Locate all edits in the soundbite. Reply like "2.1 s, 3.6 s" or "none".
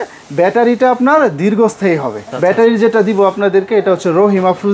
2.2 s